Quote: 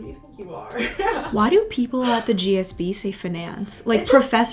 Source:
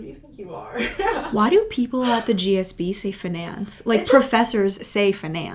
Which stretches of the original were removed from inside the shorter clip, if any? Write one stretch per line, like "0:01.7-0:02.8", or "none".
none